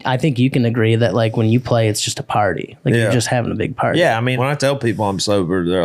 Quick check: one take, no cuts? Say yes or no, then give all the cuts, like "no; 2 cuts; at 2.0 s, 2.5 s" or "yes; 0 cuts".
no; 1 cut; at 4.4 s